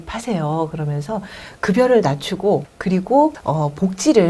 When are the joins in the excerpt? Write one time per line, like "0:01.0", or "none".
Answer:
0:02.7
0:03.4